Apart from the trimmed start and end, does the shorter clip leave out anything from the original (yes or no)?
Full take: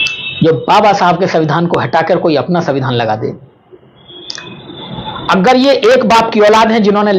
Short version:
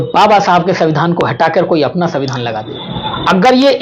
yes